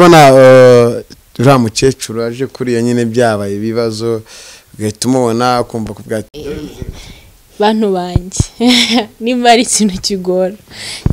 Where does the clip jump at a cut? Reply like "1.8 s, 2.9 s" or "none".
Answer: none